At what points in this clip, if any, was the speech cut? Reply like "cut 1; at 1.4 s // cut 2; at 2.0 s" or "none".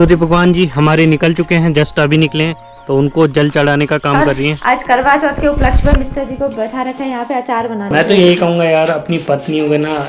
cut 1; at 4.6 s // cut 2; at 7.9 s